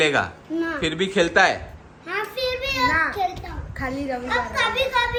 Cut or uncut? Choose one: uncut